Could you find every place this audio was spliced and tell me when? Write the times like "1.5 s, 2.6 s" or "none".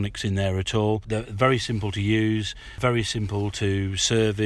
1.0 s, 2.7 s